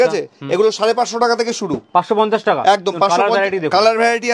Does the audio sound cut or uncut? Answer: uncut